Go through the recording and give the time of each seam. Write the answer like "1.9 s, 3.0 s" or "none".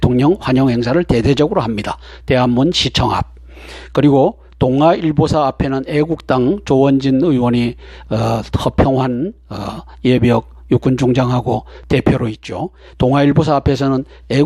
3.5 s